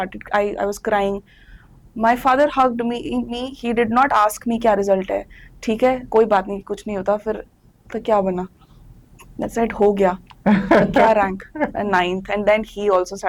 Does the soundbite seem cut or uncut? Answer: uncut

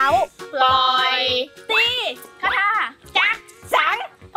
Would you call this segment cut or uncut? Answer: cut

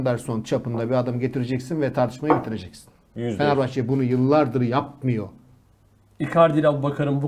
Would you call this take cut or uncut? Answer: uncut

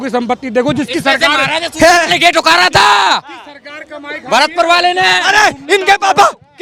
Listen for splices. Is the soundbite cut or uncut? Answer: uncut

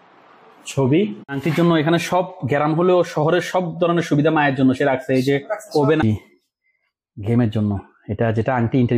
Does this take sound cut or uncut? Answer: cut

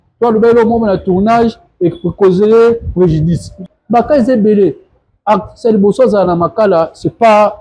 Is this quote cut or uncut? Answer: cut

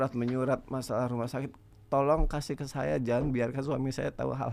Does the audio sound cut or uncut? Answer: uncut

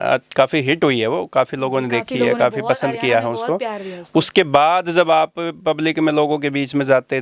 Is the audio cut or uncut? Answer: uncut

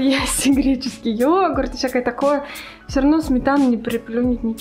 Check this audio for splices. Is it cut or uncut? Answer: uncut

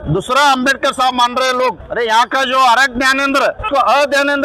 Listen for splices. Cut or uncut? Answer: cut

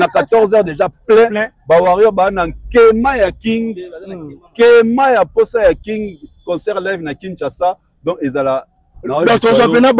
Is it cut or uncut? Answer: uncut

